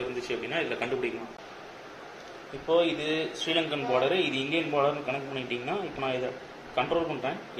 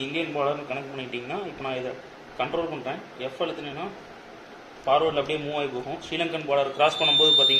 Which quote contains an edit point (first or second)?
first